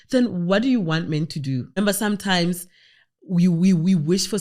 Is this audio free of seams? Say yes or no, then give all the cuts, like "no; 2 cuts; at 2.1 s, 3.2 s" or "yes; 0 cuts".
no; 1 cut; at 1.8 s